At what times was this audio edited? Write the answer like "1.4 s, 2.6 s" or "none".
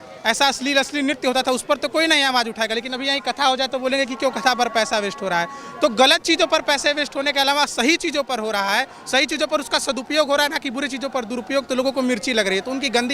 none